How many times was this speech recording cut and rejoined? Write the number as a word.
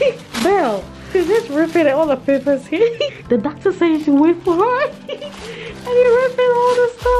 two